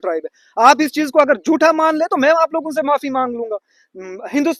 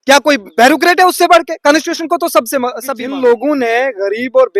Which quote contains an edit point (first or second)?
second